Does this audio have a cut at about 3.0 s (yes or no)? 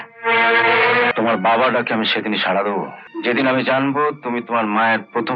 yes